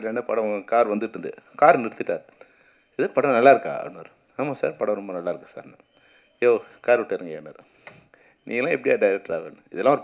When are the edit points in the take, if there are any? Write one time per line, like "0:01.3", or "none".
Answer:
none